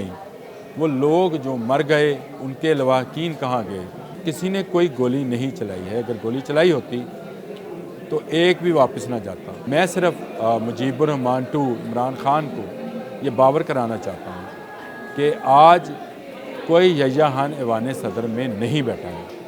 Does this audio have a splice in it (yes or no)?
yes